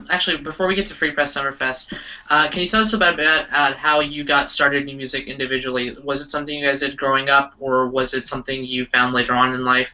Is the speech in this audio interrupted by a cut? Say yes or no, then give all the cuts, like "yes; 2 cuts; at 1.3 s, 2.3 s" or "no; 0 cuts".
yes; 1 cut; at 5.6 s